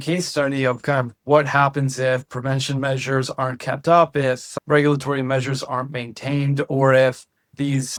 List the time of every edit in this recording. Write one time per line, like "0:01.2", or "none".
none